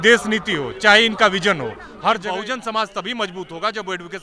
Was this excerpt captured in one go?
no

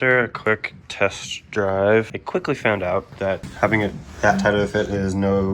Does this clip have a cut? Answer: yes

